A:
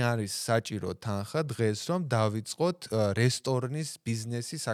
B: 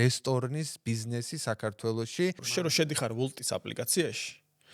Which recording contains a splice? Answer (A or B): B